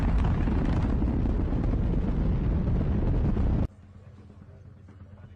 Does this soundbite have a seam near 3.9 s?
no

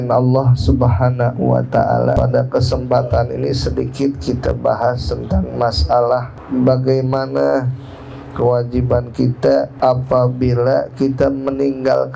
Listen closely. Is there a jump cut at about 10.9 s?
no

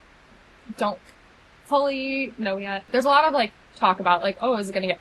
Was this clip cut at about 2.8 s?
yes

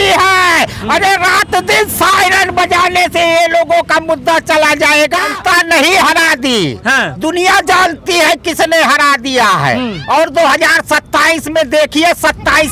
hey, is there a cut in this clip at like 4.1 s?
no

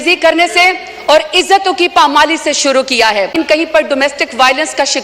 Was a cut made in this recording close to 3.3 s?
yes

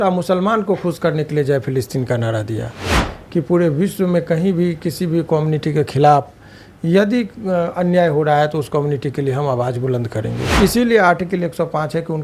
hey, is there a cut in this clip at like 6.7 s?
no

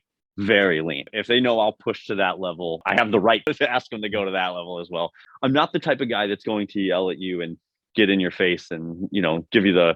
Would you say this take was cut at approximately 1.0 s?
yes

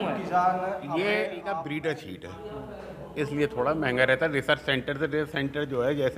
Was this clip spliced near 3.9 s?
no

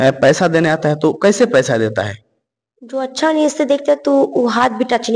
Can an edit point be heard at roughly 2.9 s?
no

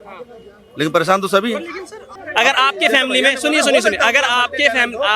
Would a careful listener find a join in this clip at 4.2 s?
no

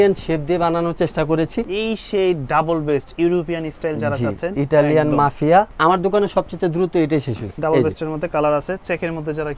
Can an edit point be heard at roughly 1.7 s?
yes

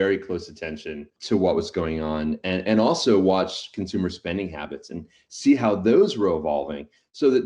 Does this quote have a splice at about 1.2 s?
yes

